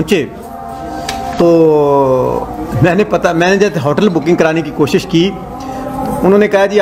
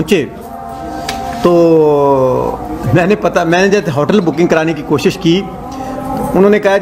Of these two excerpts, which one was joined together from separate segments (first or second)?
first